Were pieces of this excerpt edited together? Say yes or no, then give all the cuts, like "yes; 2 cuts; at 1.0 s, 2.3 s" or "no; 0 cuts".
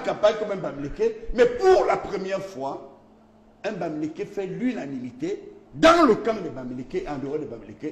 no; 0 cuts